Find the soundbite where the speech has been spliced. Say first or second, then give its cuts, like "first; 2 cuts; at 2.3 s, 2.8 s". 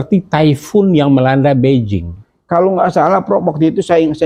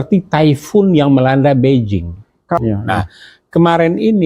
second; 1 cut; at 2.6 s